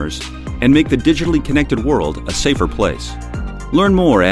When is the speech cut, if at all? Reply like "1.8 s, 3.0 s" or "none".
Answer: none